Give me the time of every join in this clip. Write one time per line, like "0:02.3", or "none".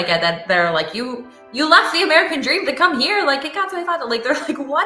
none